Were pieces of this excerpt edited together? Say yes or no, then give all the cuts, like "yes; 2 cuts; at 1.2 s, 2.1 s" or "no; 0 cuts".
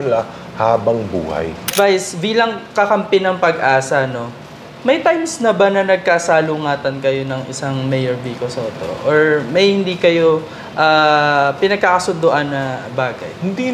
yes; 1 cut; at 1.7 s